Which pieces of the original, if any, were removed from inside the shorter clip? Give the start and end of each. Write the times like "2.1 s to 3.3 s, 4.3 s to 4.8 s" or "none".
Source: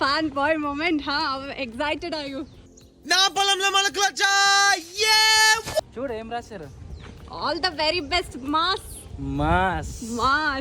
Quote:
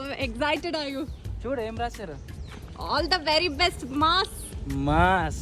2.8 s to 5.9 s